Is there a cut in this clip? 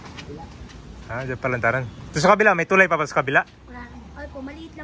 no; 0 cuts

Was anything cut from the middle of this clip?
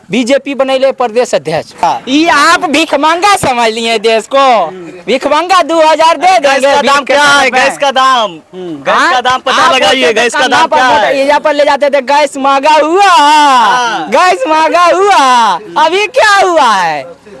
yes; 1 cut; at 1.8 s

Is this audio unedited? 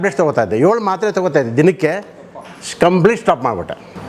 yes; 0 cuts

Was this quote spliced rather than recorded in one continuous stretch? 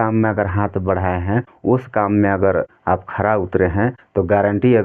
yes; 3 cuts; at 1.5 s, 2.7 s, 4.0 s

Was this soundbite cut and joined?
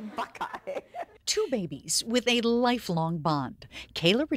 yes; 1 cut; at 1.2 s

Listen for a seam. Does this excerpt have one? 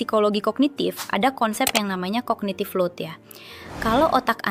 no; 0 cuts

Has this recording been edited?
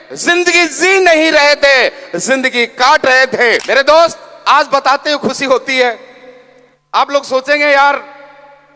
yes; 1 cut; at 3.6 s

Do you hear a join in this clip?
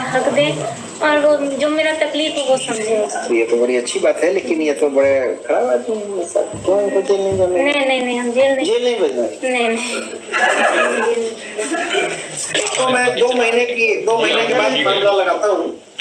yes; 1 cut; at 12.6 s

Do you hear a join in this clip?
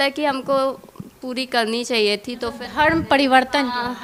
no; 0 cuts

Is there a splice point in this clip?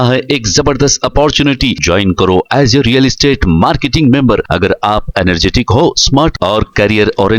no; 0 cuts

